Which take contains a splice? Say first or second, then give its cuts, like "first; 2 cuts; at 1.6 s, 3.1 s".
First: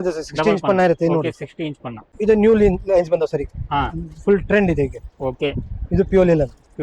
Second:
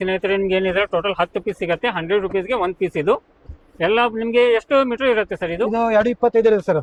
first; 1 cut; at 2.1 s